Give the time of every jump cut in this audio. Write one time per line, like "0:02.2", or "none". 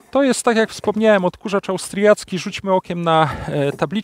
none